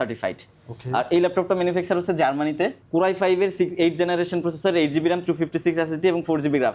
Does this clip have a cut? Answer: no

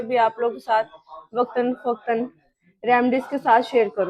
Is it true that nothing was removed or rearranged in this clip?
yes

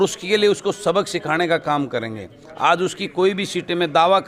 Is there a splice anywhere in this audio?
no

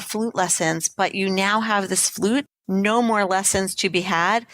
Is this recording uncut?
no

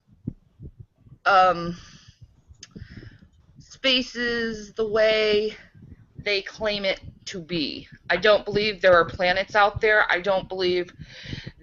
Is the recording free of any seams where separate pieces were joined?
yes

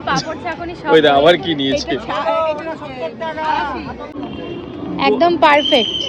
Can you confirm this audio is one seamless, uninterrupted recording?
no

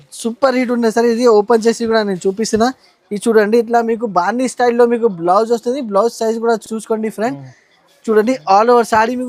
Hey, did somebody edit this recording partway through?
no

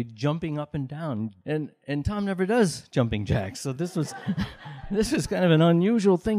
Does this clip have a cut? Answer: yes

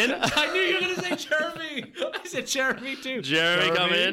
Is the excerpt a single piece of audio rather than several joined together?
yes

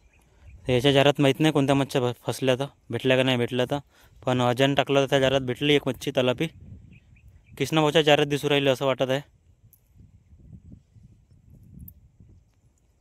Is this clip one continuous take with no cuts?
yes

